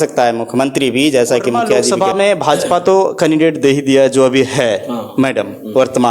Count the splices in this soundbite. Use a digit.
1